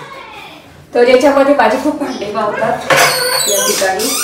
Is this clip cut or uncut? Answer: uncut